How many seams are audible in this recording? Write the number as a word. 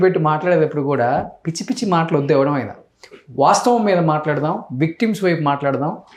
zero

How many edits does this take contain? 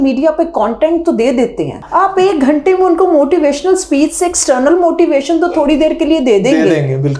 one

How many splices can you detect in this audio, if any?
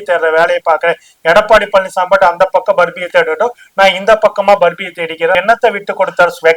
one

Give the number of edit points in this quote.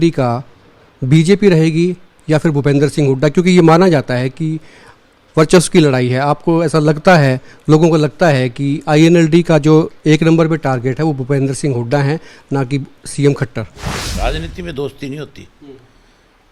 two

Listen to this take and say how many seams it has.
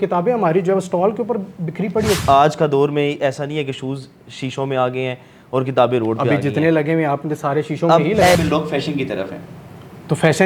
two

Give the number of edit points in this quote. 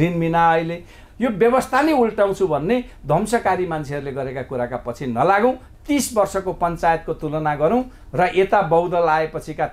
two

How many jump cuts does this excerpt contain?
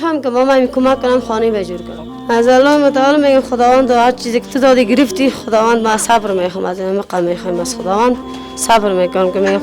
one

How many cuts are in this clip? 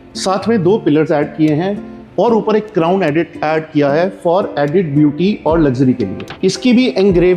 one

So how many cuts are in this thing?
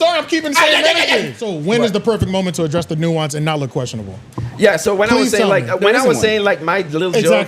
one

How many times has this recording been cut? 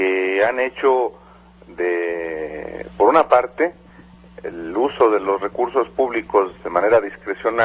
one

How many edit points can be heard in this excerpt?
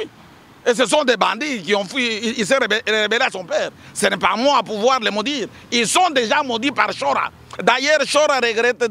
zero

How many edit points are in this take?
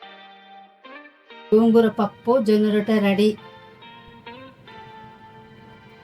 one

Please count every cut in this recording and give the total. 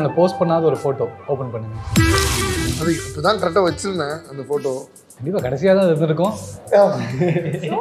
one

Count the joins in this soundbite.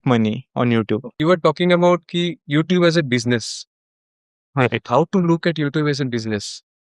one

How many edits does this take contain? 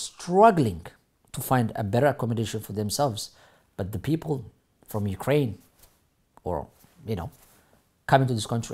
zero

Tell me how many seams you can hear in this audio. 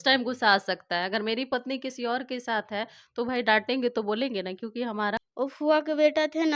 one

